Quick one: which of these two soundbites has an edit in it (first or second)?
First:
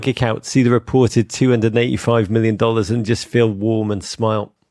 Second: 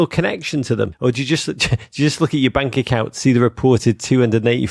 second